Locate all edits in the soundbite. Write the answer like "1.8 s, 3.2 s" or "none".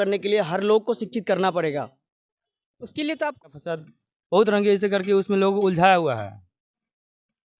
3.4 s